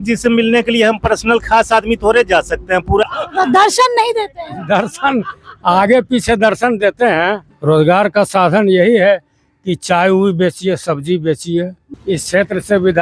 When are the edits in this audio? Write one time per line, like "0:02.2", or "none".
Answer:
0:03.0
0:07.5
0:11.9